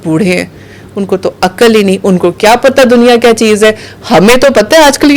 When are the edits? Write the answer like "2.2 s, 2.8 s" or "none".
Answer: none